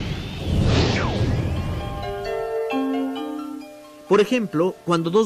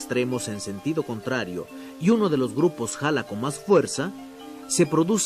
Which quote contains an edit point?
second; 1 cut; at 3.3 s

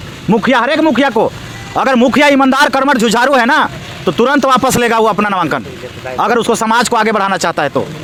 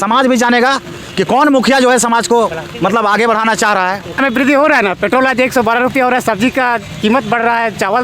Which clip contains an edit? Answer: second; 1 cut; at 4.2 s

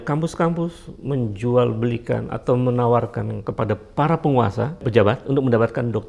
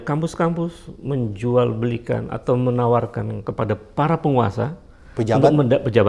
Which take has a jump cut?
first; 1 cut; at 4.9 s

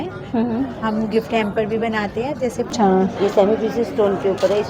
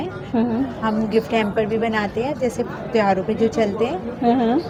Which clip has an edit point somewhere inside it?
first; 1 cut; at 2.7 s

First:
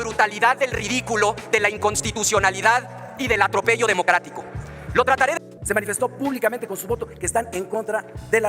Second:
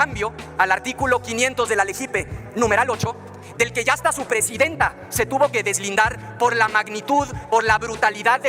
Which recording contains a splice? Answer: first; 1 cut; at 5.4 s

